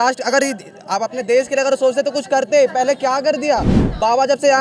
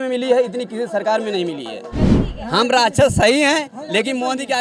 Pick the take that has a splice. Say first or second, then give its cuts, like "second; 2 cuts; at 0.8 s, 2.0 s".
second; 1 cut; at 2.0 s